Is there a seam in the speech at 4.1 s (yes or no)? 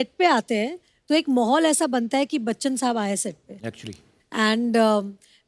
no